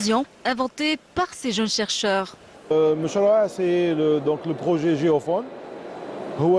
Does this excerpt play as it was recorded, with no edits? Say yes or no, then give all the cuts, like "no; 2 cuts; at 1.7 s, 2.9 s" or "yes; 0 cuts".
no; 1 cut; at 4.5 s